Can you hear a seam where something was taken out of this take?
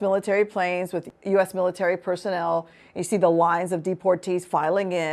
yes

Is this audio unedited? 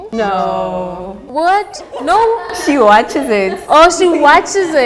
yes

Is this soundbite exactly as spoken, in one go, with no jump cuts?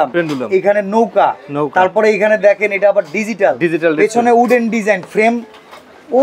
yes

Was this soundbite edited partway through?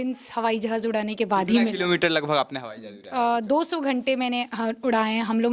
no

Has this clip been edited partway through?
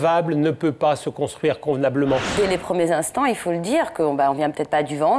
yes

